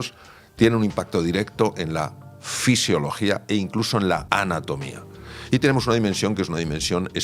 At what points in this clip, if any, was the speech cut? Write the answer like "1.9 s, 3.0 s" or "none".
4.2 s